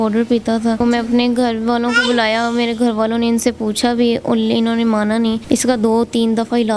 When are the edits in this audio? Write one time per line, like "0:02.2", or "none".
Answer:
0:00.8
0:05.4